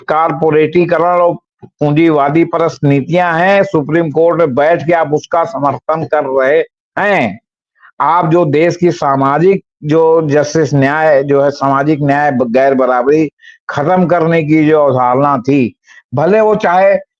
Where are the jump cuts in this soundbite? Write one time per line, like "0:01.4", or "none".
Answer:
none